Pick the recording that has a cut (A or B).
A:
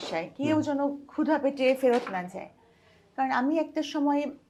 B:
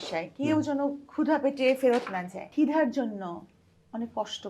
B